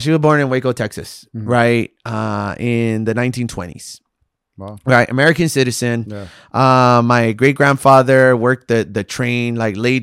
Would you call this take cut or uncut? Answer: uncut